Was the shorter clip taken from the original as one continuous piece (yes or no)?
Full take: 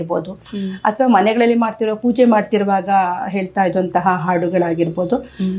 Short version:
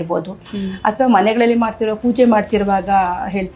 yes